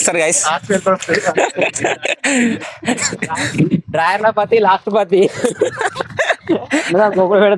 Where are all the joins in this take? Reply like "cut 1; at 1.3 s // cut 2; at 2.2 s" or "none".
none